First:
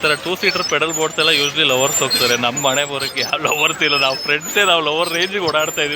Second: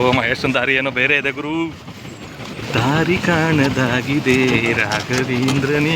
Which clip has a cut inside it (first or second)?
second